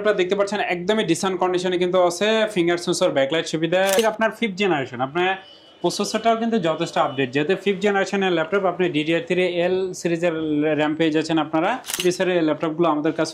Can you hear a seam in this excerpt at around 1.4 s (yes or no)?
no